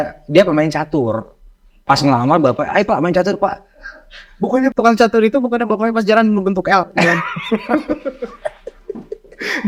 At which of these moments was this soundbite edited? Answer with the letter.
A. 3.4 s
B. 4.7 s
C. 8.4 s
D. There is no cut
B